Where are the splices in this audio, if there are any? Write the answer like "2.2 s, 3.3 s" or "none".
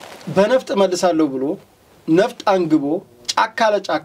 none